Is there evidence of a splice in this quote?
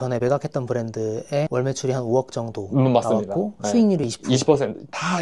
no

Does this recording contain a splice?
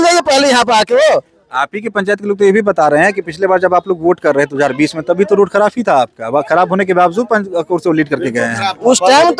no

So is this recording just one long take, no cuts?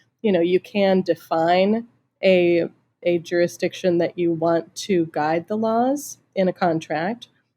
yes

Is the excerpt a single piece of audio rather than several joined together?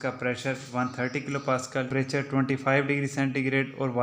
no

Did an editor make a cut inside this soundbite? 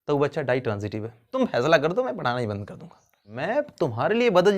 yes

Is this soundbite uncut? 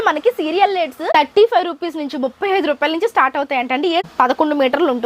no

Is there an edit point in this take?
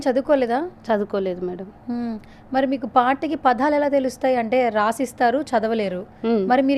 no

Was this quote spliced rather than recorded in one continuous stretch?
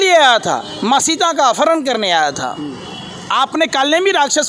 no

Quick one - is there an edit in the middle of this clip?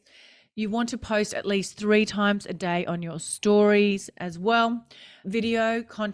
no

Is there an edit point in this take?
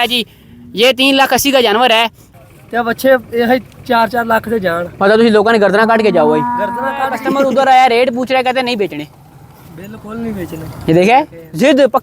yes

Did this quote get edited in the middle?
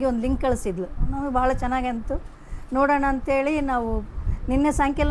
no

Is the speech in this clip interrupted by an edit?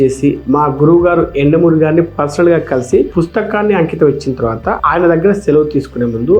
no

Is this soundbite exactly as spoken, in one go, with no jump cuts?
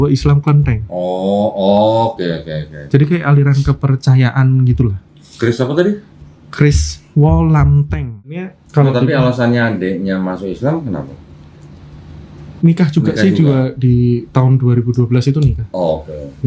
no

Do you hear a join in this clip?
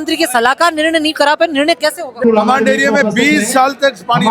yes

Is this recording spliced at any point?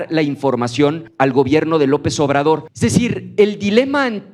yes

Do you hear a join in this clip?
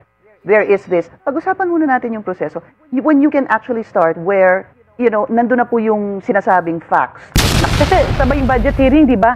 yes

